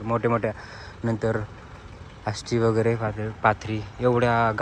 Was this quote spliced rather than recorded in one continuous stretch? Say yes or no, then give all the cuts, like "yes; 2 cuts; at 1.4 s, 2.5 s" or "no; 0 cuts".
no; 0 cuts